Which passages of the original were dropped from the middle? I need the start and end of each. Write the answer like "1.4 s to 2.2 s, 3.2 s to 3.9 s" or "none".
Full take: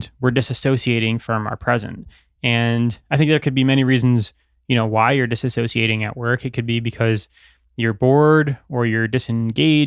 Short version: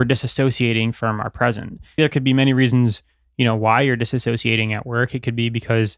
2.2 s to 3.3 s